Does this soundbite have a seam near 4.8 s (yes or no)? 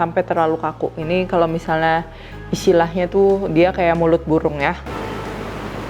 yes